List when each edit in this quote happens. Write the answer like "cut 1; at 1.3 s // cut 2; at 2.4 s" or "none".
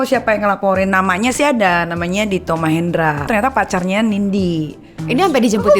cut 1; at 3.3 s // cut 2; at 4.9 s